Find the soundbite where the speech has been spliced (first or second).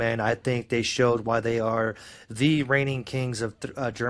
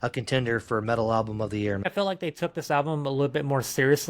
second